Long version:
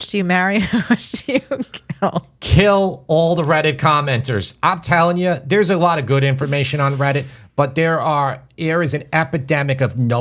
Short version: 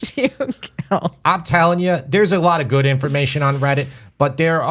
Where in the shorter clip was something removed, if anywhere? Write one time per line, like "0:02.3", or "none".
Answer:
0:01.2